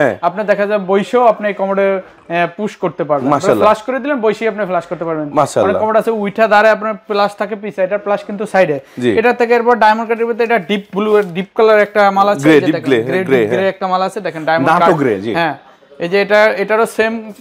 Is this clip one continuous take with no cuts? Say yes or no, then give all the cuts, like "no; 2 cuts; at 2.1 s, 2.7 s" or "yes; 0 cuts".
yes; 0 cuts